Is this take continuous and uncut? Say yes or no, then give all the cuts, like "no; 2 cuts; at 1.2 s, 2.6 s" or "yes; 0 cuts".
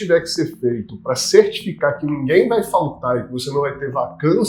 yes; 0 cuts